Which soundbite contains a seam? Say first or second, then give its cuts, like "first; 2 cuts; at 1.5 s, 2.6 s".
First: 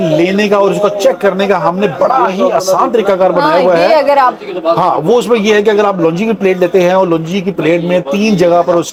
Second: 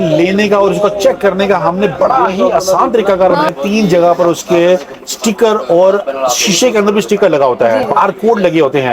second; 2 cuts; at 3.4 s, 7.9 s